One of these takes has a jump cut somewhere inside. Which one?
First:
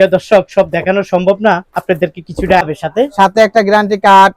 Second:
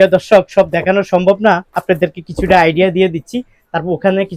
first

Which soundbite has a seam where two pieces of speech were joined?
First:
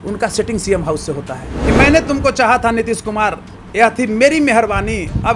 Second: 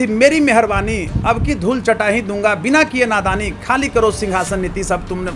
first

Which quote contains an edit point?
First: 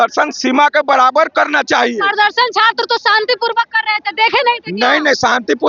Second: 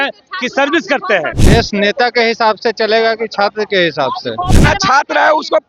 second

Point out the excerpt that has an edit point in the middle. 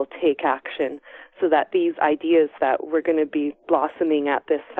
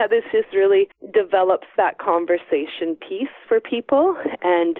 second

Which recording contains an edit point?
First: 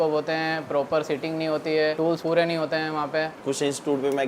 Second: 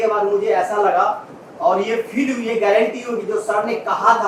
first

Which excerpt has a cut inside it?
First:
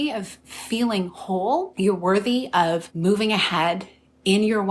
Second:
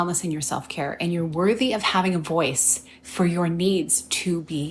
first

